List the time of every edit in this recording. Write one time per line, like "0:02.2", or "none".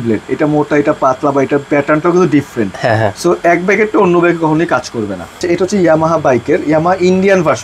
0:05.4